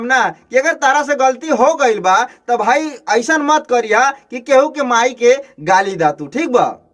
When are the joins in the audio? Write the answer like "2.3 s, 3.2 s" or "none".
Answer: none